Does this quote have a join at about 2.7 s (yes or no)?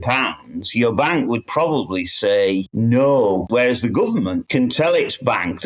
yes